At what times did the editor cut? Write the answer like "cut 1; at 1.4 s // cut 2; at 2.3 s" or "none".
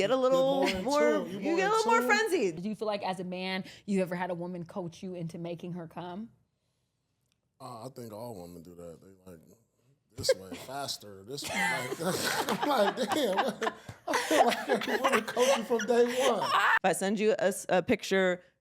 cut 1; at 2.5 s // cut 2; at 16.7 s